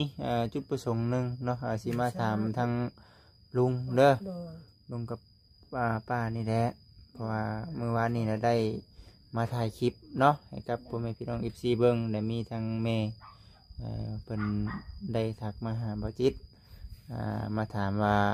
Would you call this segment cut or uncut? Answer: uncut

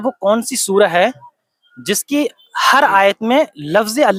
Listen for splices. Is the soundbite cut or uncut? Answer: uncut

